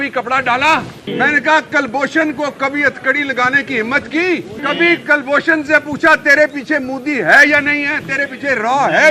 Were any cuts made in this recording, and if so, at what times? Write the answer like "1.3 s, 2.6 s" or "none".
1.0 s, 4.5 s